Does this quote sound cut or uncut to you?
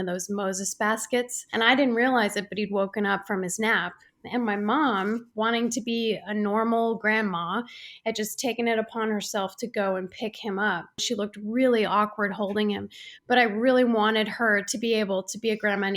cut